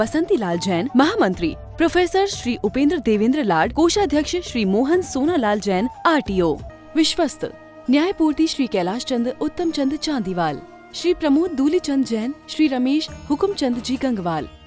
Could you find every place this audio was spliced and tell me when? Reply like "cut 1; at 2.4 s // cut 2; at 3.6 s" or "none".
cut 1; at 6.7 s